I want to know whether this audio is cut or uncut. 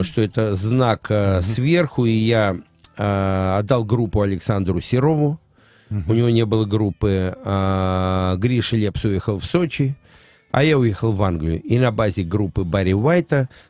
uncut